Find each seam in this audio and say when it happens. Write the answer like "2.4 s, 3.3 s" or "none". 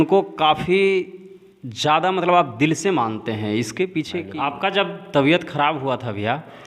4.2 s